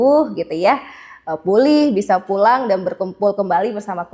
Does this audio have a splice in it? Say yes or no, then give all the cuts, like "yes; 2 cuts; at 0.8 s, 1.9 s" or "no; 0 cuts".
no; 0 cuts